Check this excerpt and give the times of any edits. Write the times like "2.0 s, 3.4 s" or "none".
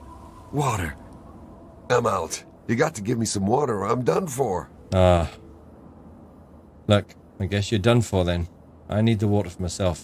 2.5 s, 4.7 s, 7.2 s